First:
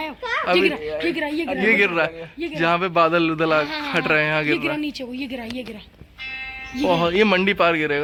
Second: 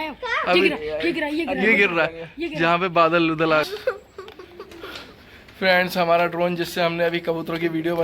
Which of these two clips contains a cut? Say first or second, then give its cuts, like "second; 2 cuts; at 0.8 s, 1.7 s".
second; 1 cut; at 3.8 s